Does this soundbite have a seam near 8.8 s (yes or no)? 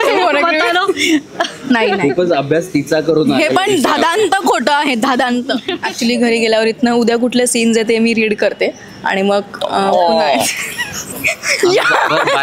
no